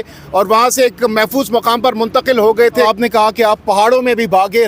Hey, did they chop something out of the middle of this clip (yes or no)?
yes